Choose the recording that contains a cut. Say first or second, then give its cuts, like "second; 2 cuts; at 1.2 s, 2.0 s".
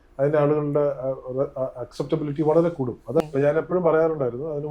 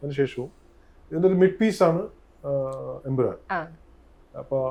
first; 1 cut; at 3.2 s